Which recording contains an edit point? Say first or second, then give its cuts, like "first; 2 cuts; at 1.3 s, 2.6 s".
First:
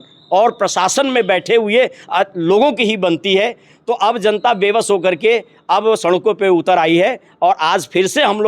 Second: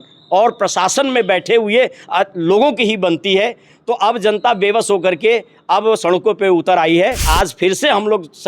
second; 1 cut; at 7.3 s